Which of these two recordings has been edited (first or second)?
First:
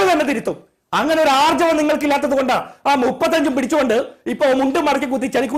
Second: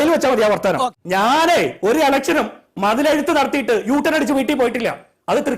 second